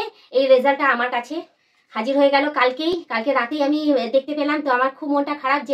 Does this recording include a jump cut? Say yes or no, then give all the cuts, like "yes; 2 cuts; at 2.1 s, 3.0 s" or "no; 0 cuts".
no; 0 cuts